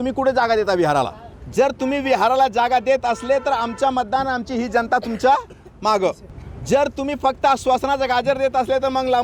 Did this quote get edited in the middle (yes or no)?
no